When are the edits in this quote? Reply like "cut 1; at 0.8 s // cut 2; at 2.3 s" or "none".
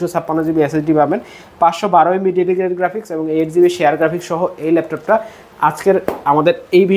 none